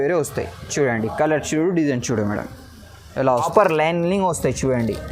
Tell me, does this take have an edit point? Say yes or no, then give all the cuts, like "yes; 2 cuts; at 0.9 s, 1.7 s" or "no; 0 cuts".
yes; 1 cut; at 3.5 s